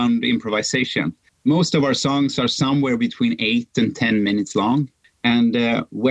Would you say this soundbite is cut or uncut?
cut